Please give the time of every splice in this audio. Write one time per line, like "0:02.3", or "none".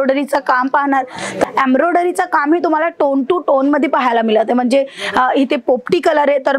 0:01.4